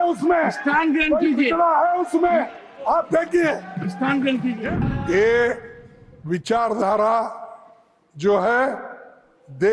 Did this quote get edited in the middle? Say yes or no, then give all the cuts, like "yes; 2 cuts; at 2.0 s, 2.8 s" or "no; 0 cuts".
yes; 1 cut; at 4.6 s